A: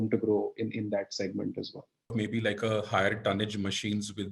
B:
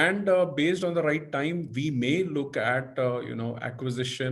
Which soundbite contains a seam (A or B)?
A